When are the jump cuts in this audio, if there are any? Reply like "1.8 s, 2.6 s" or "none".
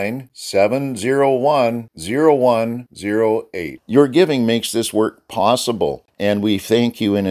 6.1 s